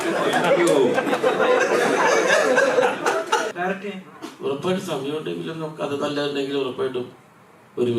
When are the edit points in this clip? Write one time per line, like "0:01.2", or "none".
0:03.5